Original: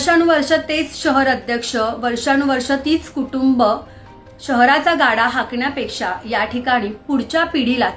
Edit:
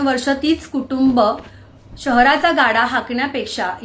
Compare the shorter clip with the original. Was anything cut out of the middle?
no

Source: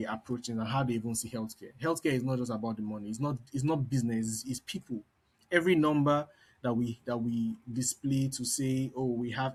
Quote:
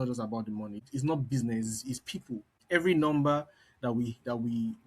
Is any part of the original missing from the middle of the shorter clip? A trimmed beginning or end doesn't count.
yes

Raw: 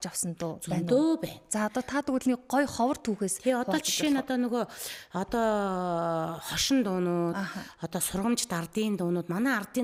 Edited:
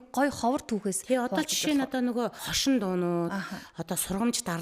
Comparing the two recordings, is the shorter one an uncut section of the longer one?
no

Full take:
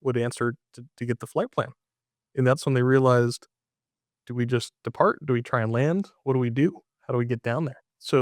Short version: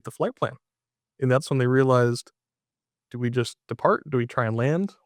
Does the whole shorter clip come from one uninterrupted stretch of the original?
yes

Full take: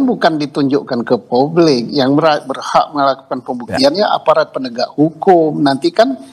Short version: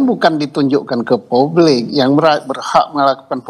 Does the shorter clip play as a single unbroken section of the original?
yes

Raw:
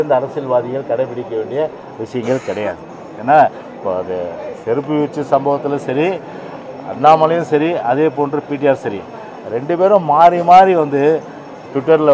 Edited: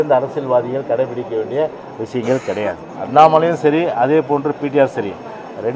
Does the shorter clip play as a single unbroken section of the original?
no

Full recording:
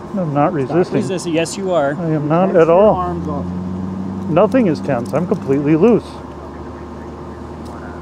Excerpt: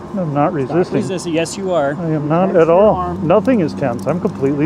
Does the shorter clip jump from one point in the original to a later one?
yes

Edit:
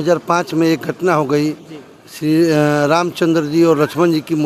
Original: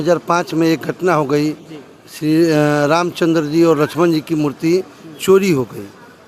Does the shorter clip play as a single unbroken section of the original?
yes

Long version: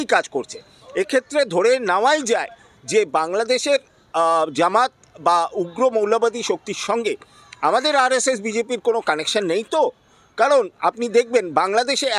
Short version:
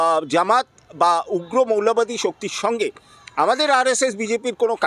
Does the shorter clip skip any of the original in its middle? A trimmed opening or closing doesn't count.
no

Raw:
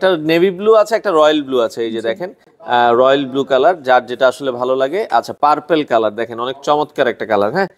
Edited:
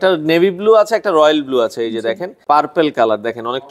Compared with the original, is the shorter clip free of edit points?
no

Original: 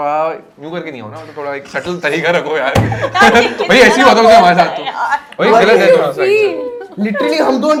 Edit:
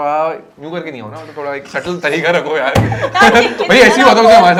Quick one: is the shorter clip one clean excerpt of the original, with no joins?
yes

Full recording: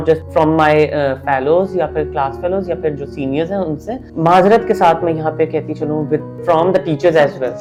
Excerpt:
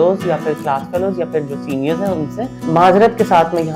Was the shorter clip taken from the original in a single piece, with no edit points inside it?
yes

